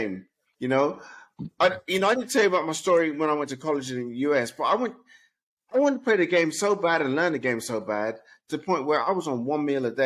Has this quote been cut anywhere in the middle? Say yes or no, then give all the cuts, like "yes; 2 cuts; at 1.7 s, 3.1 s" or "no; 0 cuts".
no; 0 cuts